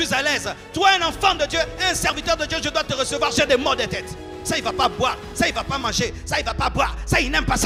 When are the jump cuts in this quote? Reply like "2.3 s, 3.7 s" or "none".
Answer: none